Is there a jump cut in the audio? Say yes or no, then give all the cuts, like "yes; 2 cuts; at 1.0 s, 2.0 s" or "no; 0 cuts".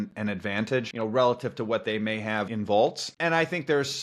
yes; 3 cuts; at 0.9 s, 2.5 s, 3.1 s